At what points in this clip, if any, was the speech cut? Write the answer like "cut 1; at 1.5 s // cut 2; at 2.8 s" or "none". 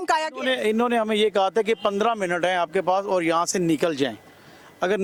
none